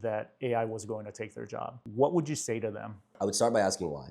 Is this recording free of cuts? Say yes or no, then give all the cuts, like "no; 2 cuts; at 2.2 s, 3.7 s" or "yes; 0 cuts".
no; 2 cuts; at 1.8 s, 3.1 s